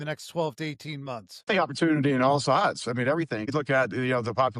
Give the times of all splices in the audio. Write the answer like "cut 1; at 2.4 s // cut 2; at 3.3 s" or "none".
cut 1; at 1.3 s // cut 2; at 3.5 s